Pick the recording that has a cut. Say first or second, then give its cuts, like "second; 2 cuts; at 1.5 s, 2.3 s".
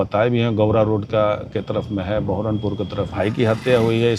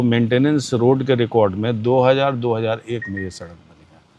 first; 1 cut; at 3.1 s